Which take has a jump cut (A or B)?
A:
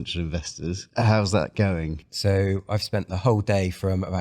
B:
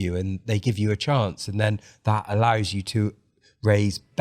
A